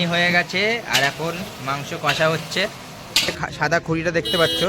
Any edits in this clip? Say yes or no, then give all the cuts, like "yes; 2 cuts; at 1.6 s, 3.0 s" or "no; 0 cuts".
yes; 1 cut; at 3.4 s